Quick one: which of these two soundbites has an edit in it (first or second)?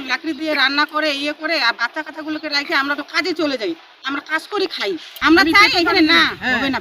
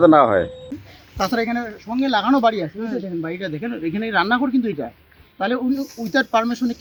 first